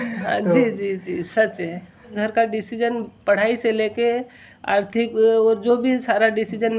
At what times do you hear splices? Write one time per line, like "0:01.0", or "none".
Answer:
0:02.1